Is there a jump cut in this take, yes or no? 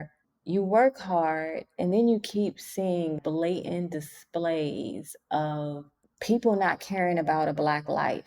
yes